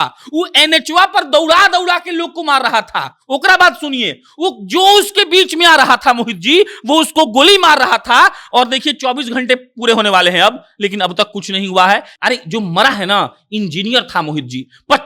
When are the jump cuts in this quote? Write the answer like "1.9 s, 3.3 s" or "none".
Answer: 12.1 s